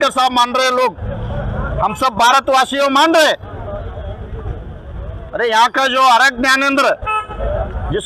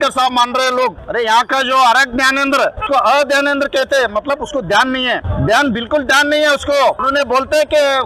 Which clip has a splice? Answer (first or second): second